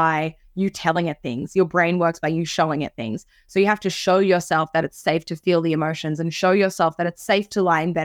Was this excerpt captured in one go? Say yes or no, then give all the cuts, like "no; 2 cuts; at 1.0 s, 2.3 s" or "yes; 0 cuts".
yes; 0 cuts